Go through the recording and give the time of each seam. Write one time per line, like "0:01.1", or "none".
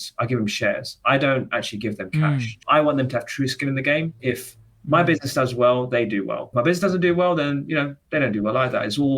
0:02.6
0:04.2
0:06.5